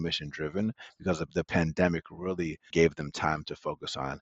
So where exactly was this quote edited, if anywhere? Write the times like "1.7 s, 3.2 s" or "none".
2.7 s